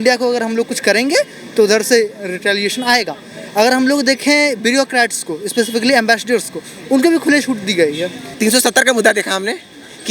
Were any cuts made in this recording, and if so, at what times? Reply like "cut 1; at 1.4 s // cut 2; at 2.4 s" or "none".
cut 1; at 8.2 s